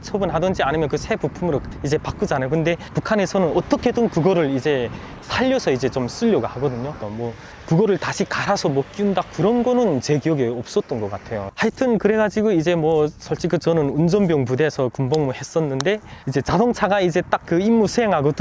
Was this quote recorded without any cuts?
yes; 0 cuts

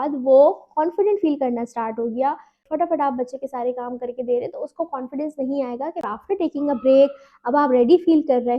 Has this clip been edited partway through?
yes; 2 cuts; at 2.7 s, 6.0 s

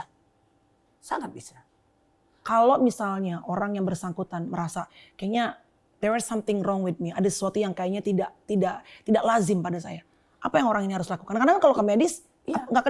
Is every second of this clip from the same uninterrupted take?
no; 1 cut; at 2.3 s

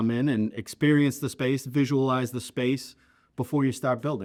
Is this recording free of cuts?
yes; 0 cuts

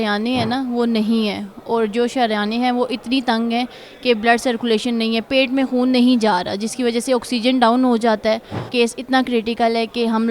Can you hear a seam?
yes; 1 cut; at 8.6 s

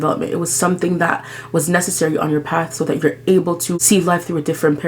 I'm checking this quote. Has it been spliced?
yes; 1 cut; at 3.7 s

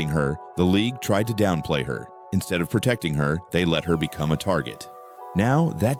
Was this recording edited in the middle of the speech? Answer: no; 0 cuts

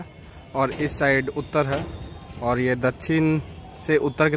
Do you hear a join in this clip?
no; 0 cuts

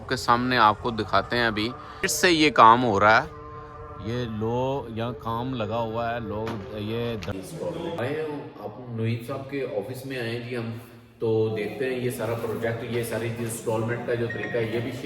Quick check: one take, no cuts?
no; 1 cut; at 7.3 s

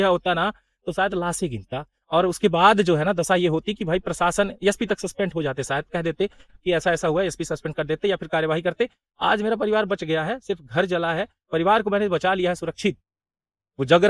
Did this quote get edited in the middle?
no; 0 cuts

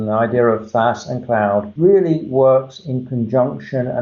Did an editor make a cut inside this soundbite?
yes; 1 cut; at 1.7 s

